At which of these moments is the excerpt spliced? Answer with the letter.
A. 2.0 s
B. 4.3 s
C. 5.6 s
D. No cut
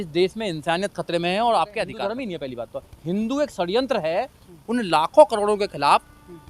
A